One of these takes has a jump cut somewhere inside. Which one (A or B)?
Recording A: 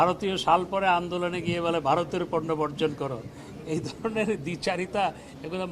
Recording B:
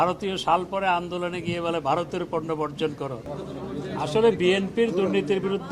B